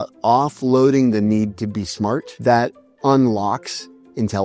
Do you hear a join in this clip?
yes; 1 cut; at 2.3 s

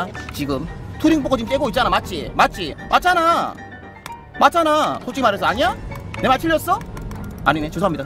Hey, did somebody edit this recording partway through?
no; 0 cuts

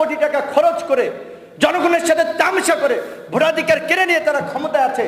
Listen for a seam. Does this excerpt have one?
no; 0 cuts

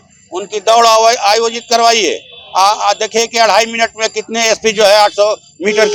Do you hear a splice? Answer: no; 0 cuts

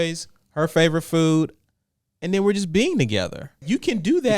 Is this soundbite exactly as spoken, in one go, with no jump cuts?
no; 1 cut; at 3.5 s

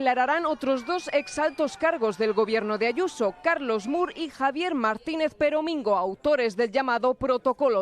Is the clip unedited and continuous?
yes; 0 cuts

